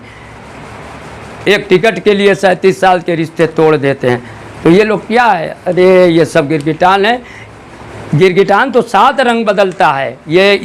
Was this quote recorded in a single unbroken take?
yes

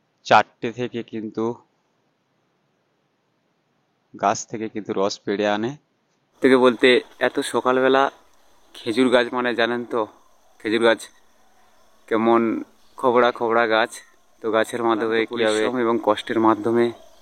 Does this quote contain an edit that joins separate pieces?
yes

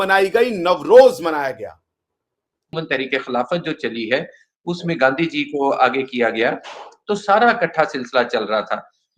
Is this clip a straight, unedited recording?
no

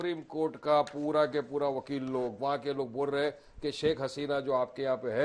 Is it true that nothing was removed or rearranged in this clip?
yes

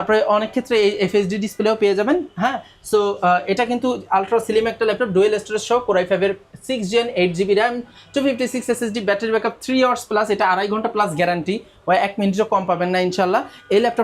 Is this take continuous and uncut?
yes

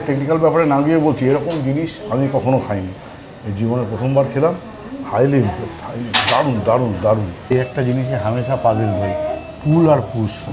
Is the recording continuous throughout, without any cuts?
no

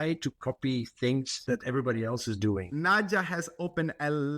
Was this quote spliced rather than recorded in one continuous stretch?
yes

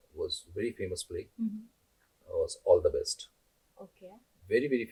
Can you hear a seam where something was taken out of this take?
no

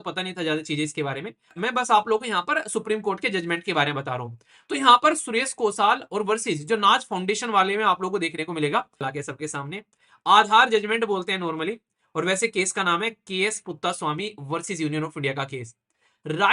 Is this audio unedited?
no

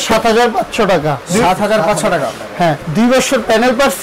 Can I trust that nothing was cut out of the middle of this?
no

